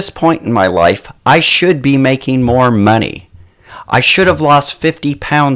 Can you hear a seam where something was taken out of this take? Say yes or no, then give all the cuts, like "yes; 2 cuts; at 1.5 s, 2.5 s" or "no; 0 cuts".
yes; 1 cut; at 3.6 s